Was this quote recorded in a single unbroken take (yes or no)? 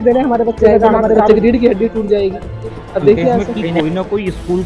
no